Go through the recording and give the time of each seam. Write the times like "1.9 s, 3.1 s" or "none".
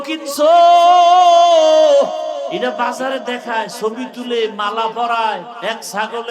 2.5 s, 5.5 s